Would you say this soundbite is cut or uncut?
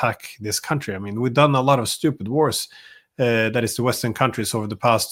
uncut